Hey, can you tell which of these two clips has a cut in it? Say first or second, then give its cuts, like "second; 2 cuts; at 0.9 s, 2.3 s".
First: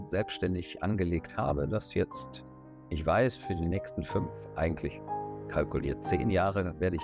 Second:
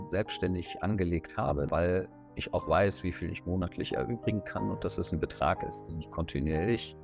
second; 1 cut; at 1.7 s